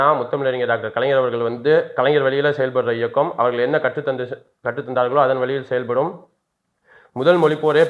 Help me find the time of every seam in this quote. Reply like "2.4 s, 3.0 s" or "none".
none

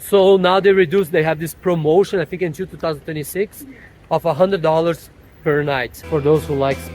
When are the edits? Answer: 6.0 s

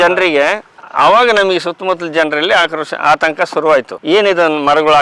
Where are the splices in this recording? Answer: 3.9 s

